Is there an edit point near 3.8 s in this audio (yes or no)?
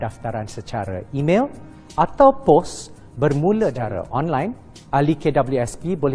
yes